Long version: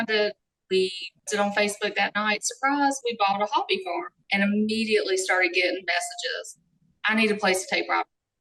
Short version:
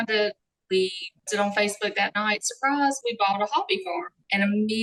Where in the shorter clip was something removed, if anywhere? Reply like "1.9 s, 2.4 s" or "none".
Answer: none